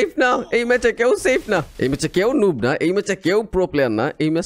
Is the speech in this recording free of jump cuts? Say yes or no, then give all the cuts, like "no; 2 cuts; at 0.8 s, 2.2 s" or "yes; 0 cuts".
no; 1 cut; at 1.7 s